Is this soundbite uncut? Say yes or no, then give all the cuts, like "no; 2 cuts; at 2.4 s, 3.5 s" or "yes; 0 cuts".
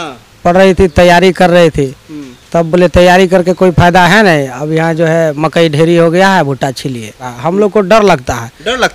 no; 1 cut; at 7.3 s